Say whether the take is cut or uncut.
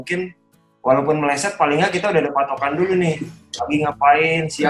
uncut